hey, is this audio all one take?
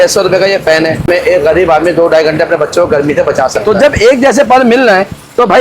no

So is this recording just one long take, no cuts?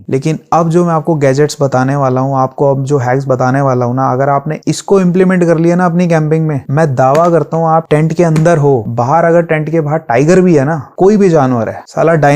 no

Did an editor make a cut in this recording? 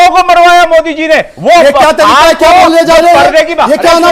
yes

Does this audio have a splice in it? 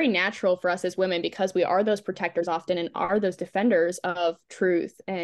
no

